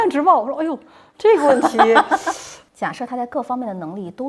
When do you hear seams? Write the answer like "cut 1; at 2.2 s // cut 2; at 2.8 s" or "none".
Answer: cut 1; at 2.5 s